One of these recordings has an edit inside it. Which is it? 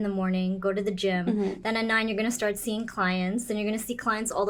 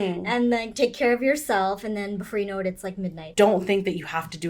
second; 1 cut; at 3.2 s

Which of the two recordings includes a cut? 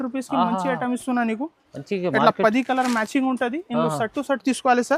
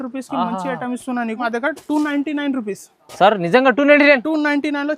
second; 1 cut; at 1.4 s

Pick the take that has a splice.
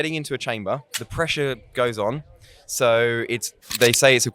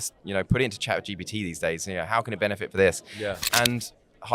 first; 1 cut; at 1.0 s

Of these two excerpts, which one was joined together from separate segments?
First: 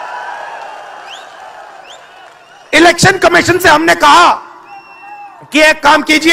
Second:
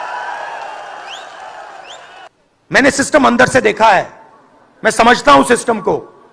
second; 1 cut; at 2.5 s

